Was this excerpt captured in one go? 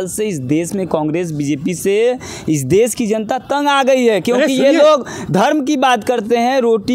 yes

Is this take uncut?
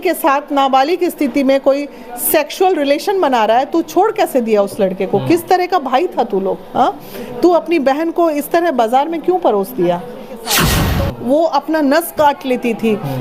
no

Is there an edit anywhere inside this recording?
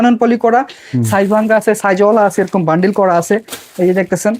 no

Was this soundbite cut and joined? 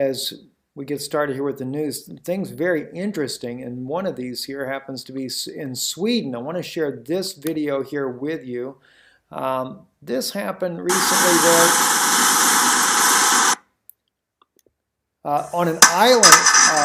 yes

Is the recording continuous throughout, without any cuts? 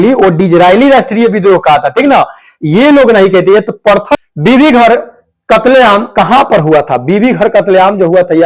no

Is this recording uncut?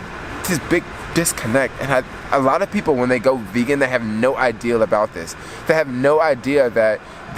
yes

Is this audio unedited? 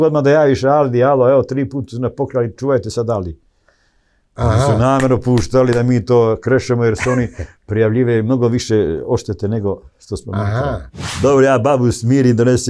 no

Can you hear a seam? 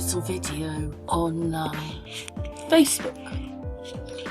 no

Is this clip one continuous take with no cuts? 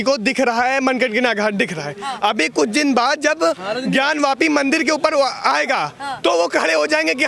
yes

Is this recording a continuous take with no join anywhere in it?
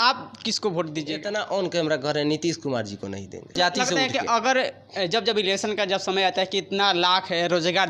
no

